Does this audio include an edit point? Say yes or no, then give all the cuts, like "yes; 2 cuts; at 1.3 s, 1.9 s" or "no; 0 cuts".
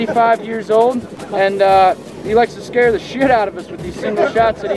yes; 1 cut; at 1.1 s